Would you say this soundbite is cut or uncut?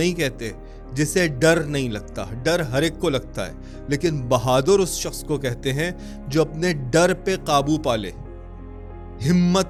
uncut